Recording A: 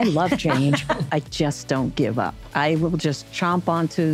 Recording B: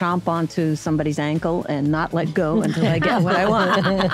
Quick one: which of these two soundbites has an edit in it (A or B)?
A